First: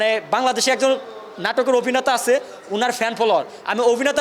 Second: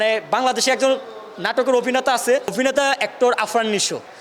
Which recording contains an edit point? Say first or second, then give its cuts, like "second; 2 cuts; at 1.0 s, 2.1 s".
second; 1 cut; at 2.5 s